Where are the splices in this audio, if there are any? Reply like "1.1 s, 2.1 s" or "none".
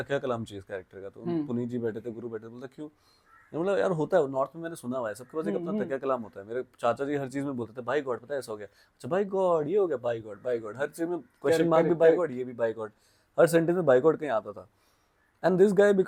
none